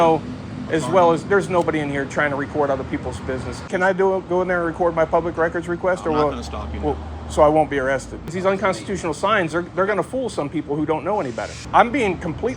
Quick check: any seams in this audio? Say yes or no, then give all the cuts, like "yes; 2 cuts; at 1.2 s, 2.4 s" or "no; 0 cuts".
yes; 3 cuts; at 3.7 s, 8.3 s, 11.6 s